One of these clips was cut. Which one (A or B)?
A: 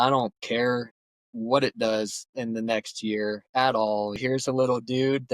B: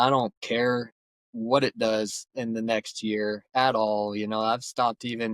A